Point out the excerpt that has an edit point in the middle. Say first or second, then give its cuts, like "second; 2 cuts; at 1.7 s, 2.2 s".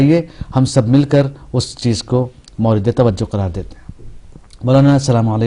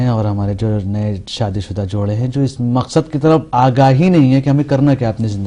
second; 1 cut; at 1.3 s